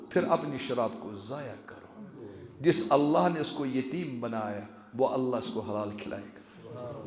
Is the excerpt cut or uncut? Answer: uncut